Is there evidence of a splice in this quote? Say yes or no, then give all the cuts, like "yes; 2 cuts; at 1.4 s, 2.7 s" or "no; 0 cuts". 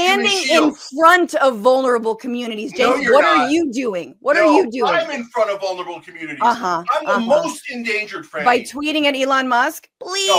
no; 0 cuts